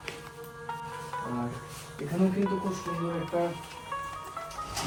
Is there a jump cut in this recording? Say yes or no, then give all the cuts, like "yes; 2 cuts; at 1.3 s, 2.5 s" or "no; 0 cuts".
no; 0 cuts